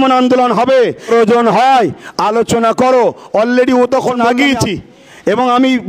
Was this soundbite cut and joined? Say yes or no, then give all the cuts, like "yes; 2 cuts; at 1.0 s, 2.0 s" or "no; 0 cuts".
yes; 1 cut; at 4.2 s